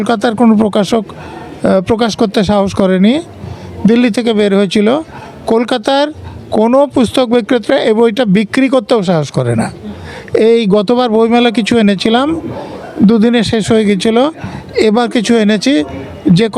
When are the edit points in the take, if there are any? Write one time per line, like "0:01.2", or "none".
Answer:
none